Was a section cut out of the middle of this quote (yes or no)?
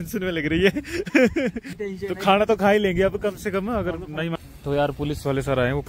yes